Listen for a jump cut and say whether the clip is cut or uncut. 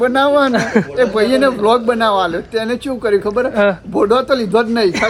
uncut